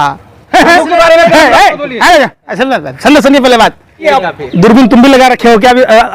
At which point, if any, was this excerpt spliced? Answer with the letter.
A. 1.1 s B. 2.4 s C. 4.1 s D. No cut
C